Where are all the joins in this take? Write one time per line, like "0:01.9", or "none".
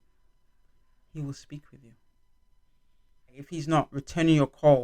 0:03.5